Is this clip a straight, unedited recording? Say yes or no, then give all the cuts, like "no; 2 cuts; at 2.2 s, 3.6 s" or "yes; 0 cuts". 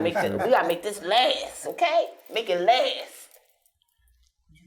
yes; 0 cuts